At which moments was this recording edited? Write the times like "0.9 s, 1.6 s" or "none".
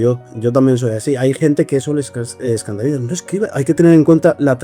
3.5 s